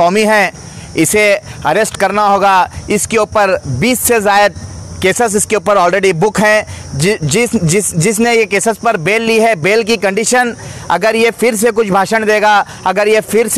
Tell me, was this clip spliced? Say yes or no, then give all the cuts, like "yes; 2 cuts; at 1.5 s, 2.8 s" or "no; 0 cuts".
no; 0 cuts